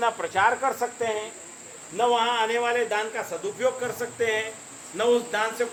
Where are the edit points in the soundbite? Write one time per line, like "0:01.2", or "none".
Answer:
none